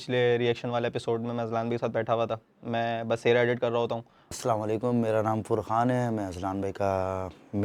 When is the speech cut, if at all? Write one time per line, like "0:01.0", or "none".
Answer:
0:04.3

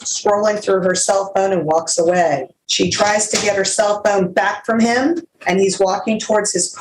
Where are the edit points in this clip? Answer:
0:02.6
0:05.3

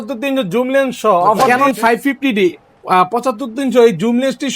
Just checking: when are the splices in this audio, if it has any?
0:01.5

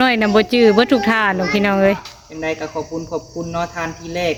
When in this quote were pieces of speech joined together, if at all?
none

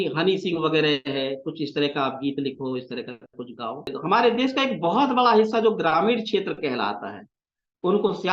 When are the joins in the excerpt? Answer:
0:04.0

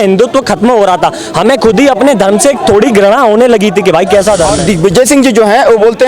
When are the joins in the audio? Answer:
0:04.9

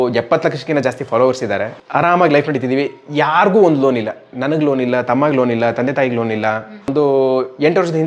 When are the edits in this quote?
0:01.8
0:06.9

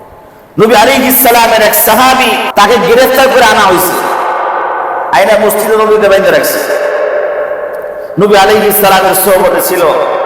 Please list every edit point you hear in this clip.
0:02.5

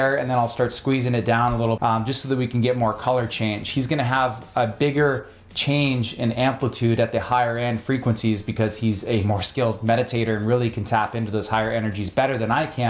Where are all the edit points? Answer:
0:01.8

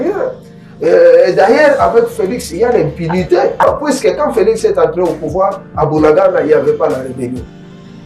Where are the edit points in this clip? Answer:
0:03.6

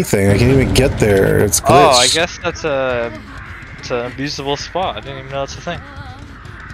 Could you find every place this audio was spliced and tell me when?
none

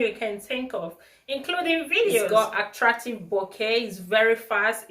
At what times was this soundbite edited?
0:02.3

